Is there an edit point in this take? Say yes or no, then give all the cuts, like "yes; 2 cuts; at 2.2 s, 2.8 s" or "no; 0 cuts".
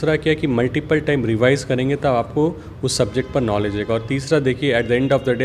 no; 0 cuts